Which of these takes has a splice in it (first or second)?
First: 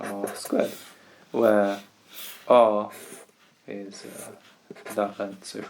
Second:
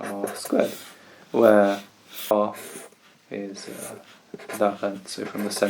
second